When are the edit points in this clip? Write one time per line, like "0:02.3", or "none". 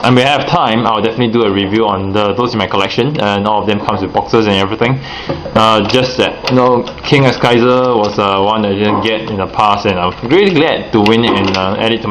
none